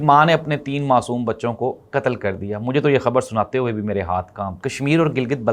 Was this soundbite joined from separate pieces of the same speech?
yes; 1 cut; at 4.6 s

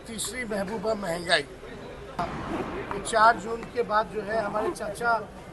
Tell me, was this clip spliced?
yes; 1 cut; at 2.2 s

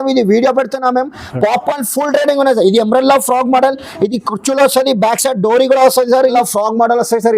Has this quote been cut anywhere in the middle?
yes; 1 cut; at 6.3 s

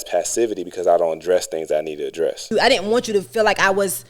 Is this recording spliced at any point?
yes; 1 cut; at 2.4 s

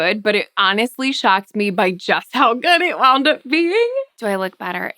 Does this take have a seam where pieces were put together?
yes; 1 cut; at 4.1 s

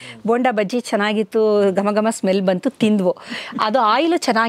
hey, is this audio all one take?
yes; 0 cuts

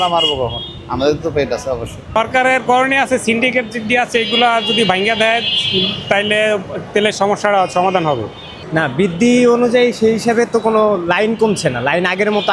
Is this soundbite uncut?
no; 2 cuts; at 2.0 s, 8.7 s

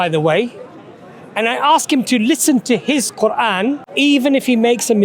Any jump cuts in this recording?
yes; 1 cut; at 3.9 s

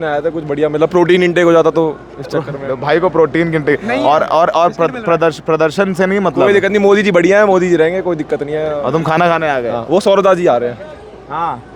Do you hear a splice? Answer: no; 0 cuts

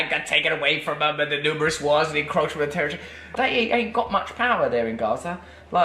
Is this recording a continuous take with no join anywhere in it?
no; 1 cut; at 3.3 s

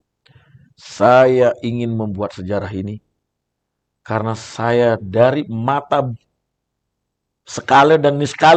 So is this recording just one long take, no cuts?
yes; 0 cuts

